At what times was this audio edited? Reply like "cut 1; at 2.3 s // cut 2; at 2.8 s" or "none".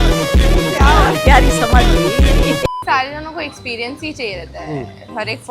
cut 1; at 2.8 s